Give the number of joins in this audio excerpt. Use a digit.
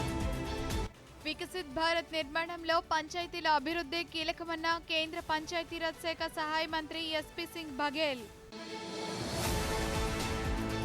1